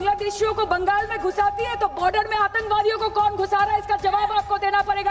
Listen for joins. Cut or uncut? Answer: uncut